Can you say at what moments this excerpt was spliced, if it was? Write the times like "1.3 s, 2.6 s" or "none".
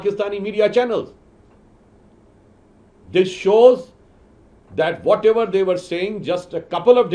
none